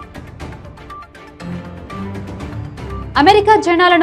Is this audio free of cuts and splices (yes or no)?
no